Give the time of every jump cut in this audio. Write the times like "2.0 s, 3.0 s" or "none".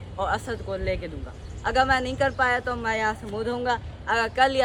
none